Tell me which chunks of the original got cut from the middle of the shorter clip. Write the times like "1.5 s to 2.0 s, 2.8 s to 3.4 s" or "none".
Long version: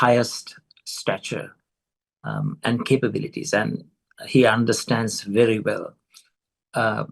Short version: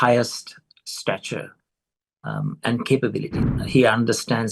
3.4 s to 3.9 s